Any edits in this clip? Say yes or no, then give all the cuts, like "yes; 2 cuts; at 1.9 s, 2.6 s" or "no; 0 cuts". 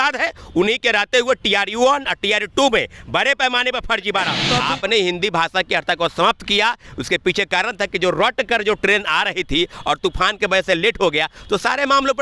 yes; 1 cut; at 4.4 s